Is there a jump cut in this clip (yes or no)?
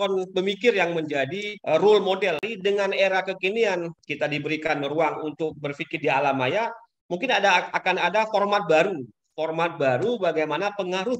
yes